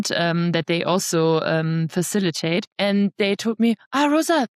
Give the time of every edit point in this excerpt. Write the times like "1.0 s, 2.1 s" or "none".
2.7 s

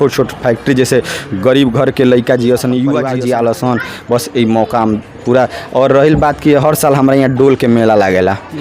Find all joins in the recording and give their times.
3.0 s

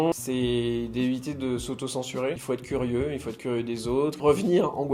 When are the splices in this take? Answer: 2.4 s, 4.2 s

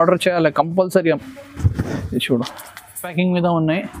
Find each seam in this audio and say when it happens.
3.0 s

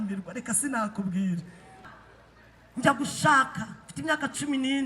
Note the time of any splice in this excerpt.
1.8 s

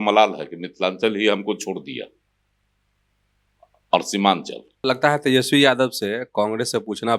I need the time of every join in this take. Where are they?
4.6 s

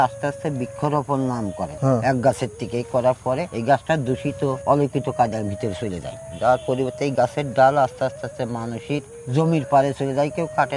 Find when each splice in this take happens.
1.7 s, 3.5 s, 4.6 s, 9.1 s

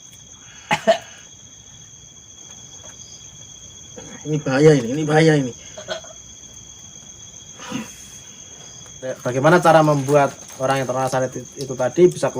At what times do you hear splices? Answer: 9.2 s

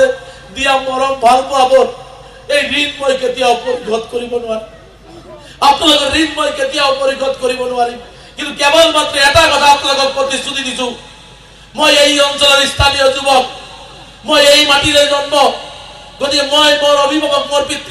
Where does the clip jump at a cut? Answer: none

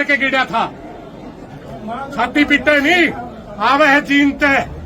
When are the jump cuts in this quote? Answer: 1.5 s

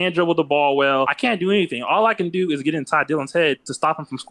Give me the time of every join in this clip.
1.1 s

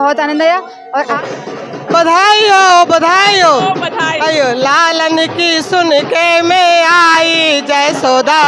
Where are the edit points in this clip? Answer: 1.1 s

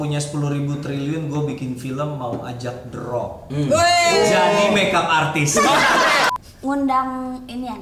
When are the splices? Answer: 6.3 s

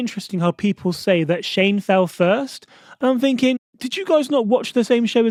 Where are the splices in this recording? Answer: none

